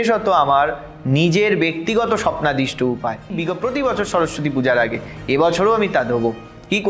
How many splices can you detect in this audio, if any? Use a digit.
1